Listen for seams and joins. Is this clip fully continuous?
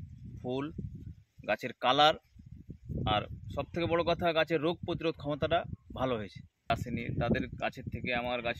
no; 1 cut; at 6.7 s

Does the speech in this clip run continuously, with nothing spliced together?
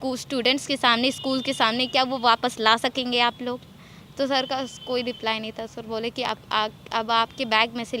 yes; 0 cuts

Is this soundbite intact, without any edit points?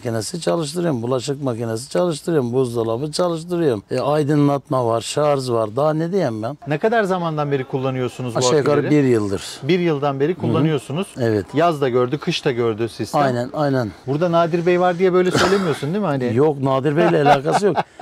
no; 2 cuts; at 6.5 s, 14.0 s

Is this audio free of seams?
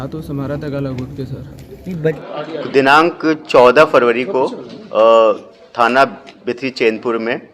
no; 1 cut; at 2.2 s

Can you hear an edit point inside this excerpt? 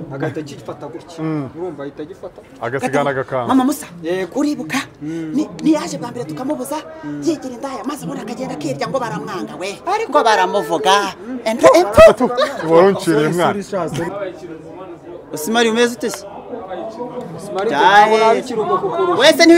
yes; 1 cut; at 14.1 s

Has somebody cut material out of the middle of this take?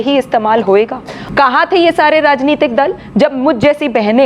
yes; 1 cut; at 1.2 s

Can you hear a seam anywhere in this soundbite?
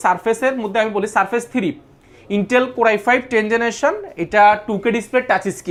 no; 0 cuts

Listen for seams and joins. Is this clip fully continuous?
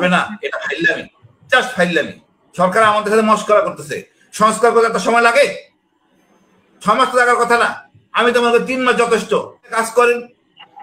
no; 1 cut; at 9.8 s

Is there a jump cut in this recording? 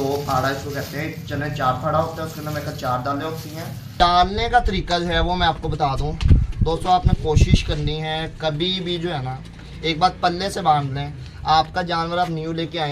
yes; 1 cut; at 4.0 s

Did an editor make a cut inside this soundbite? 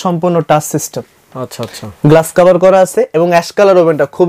no; 0 cuts

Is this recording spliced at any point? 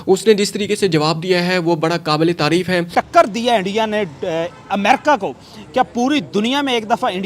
yes; 1 cut; at 2.9 s

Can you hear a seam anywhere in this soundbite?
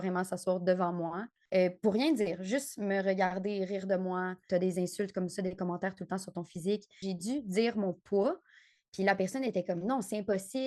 yes; 2 cuts; at 4.4 s, 7.0 s

